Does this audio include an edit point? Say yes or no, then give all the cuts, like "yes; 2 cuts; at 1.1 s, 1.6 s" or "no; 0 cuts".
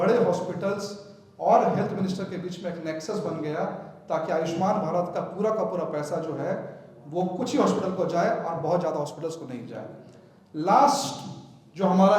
no; 0 cuts